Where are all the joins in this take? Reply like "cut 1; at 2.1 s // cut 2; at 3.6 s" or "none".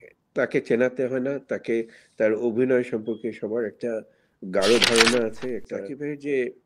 cut 1; at 5.8 s